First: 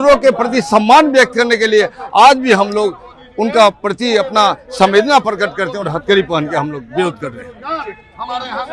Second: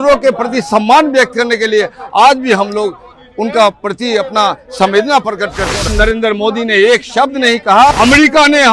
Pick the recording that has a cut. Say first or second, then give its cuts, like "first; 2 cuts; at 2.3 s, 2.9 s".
second; 2 cuts; at 5.9 s, 7.9 s